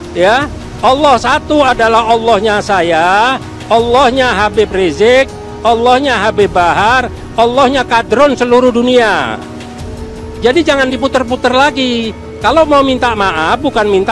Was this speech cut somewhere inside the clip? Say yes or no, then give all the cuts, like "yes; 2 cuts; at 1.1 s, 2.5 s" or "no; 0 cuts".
no; 0 cuts